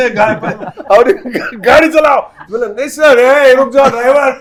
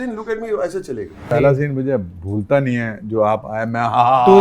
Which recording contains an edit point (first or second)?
second